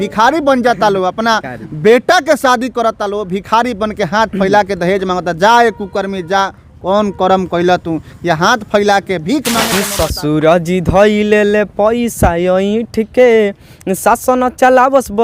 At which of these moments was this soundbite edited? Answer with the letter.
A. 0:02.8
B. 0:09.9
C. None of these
B